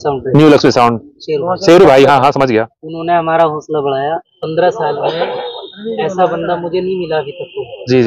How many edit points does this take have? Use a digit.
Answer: 1